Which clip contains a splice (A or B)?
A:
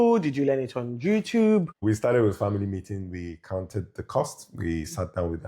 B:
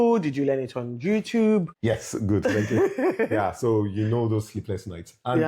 A